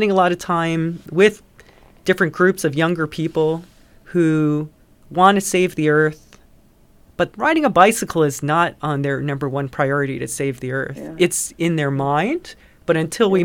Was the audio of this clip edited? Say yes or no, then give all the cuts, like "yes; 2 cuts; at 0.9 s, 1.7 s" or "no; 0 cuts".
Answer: yes; 1 cut; at 1.0 s